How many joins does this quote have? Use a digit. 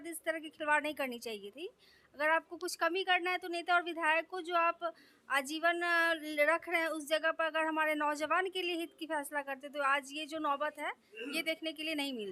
0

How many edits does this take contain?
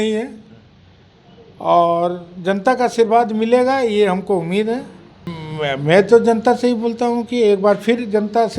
0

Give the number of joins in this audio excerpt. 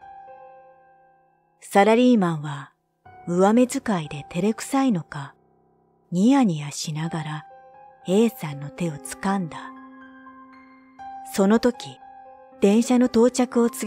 1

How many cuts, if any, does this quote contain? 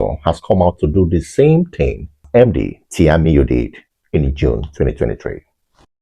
1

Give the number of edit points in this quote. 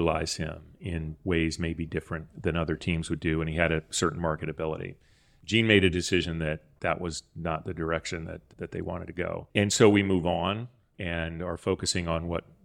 0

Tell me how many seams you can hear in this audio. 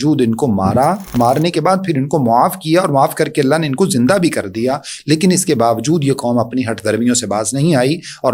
0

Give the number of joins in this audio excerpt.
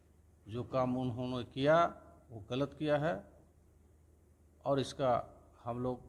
0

